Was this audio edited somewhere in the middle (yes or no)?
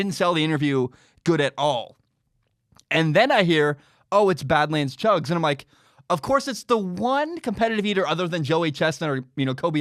no